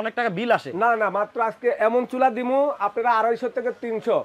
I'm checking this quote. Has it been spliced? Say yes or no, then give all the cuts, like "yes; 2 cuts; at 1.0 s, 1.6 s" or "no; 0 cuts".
no; 0 cuts